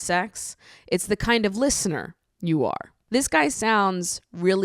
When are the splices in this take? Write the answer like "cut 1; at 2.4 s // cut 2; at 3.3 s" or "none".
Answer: cut 1; at 2.9 s